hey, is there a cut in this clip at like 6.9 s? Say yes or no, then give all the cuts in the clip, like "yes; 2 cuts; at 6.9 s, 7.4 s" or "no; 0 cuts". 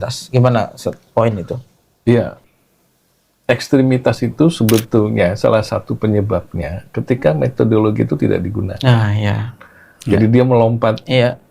no; 1 cut; at 2.5 s